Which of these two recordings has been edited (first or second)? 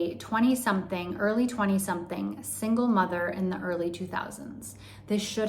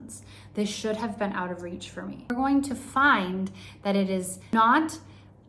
second